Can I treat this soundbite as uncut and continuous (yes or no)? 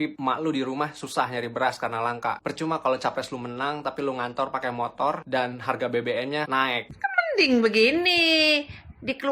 no